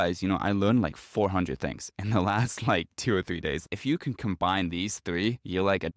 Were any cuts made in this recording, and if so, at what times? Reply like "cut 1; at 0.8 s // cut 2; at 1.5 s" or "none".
cut 1; at 3.6 s